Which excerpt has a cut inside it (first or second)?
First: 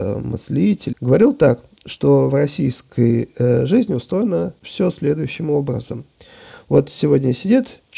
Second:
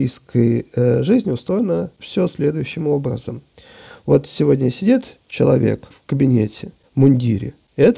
first